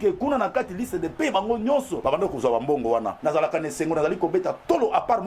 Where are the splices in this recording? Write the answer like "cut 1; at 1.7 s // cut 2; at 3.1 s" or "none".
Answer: cut 1; at 1.9 s // cut 2; at 3.1 s